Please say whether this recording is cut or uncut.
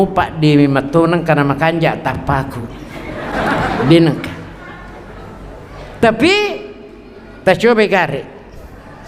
uncut